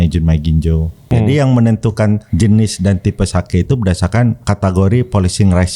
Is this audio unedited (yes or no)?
no